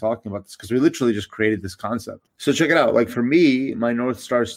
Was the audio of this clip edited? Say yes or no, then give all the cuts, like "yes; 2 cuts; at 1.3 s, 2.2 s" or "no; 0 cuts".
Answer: yes; 1 cut; at 2.2 s